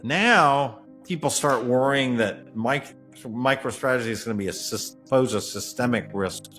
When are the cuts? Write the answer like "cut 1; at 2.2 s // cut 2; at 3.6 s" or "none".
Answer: none